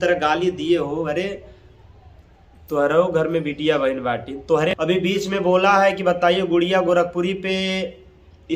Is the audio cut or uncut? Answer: cut